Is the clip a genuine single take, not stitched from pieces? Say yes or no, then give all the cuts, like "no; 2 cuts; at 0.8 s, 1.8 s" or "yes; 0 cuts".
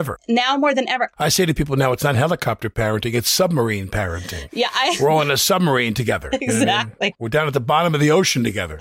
no; 1 cut; at 7.2 s